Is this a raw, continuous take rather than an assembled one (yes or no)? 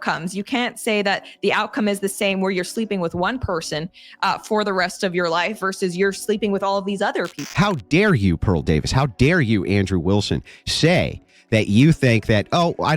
no